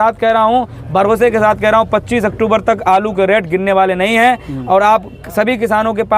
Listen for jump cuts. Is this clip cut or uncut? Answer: uncut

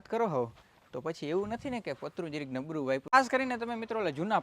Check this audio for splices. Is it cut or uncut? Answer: cut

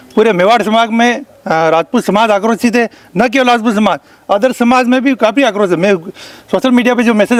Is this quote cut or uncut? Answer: uncut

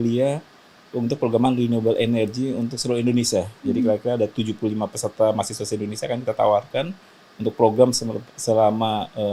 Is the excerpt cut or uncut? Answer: uncut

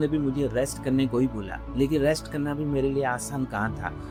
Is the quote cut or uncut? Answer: uncut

